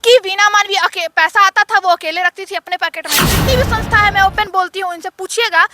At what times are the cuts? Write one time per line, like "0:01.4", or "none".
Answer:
0:03.3